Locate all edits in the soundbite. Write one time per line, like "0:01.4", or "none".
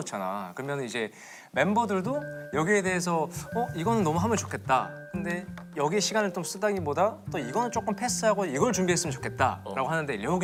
none